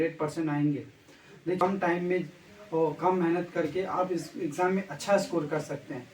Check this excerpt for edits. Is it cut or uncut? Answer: cut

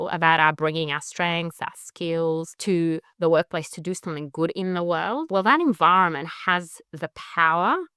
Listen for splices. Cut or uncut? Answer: cut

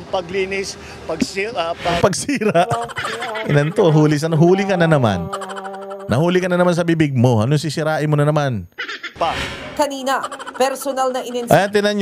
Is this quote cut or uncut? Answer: cut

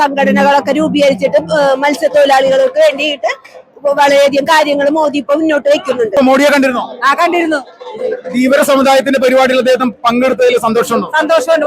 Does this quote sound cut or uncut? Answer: cut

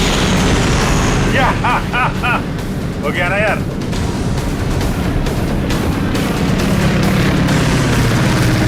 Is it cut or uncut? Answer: uncut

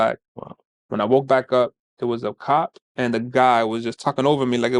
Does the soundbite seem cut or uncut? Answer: uncut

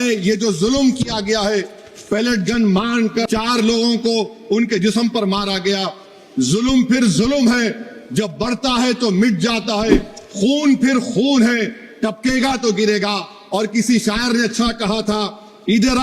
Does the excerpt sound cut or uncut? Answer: cut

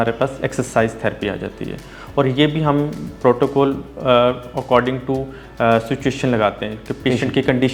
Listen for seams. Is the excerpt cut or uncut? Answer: uncut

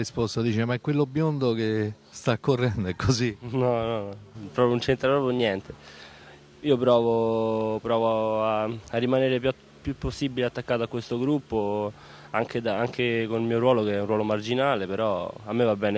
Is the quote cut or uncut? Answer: uncut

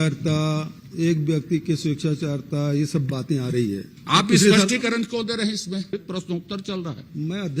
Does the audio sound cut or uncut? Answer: cut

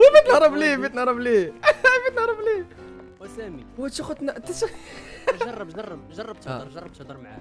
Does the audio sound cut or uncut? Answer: uncut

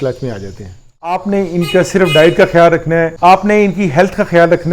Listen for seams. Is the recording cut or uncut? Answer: cut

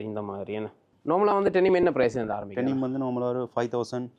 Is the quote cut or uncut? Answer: cut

